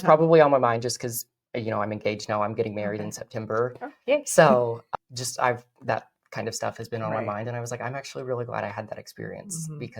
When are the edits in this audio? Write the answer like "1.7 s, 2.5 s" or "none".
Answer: 4.8 s